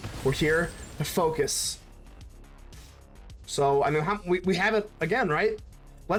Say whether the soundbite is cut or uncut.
uncut